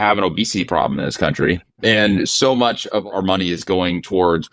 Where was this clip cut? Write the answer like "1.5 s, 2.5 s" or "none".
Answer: 1.7 s, 3.1 s